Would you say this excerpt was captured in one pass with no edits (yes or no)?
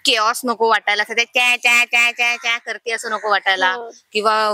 yes